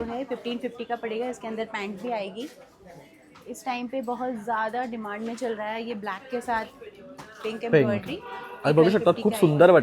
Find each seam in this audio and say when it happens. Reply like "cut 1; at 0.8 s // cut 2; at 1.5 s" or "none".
none